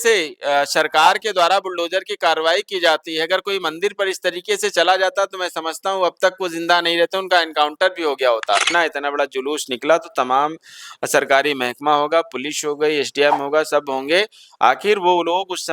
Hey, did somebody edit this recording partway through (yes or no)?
yes